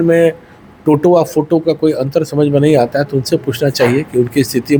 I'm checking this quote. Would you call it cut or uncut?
uncut